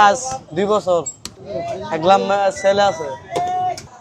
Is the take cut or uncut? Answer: uncut